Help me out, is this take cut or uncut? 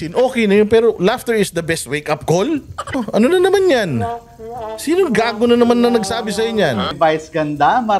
cut